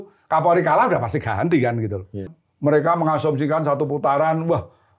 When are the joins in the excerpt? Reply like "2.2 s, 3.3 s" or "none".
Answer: 2.3 s